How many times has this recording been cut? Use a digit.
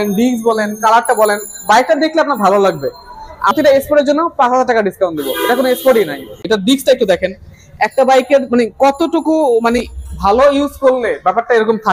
2